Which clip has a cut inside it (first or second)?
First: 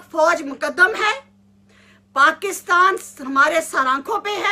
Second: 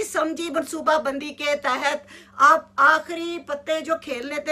second